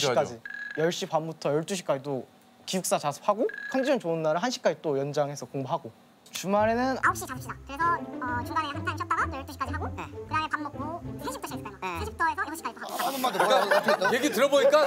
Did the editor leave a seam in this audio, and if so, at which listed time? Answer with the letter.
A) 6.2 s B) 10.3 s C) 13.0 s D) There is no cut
C